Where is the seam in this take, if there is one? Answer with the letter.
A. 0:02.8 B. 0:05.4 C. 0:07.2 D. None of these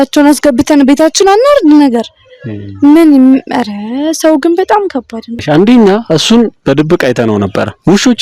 B